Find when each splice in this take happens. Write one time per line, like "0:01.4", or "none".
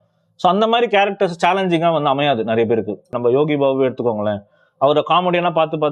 0:03.1